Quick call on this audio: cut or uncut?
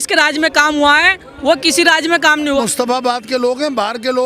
cut